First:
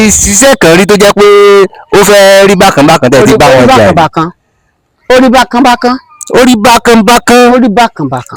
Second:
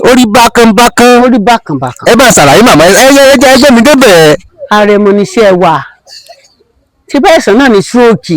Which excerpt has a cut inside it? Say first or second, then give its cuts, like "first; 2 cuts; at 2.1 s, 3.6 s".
second; 1 cut; at 4.5 s